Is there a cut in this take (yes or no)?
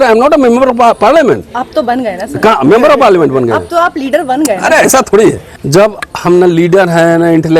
yes